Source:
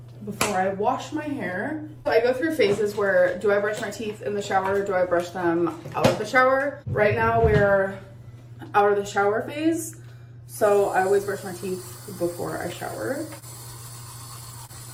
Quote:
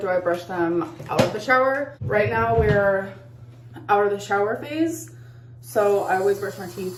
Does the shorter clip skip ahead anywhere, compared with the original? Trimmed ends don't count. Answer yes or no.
no